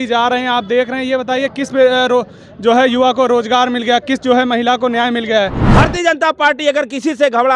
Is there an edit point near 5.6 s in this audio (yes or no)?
yes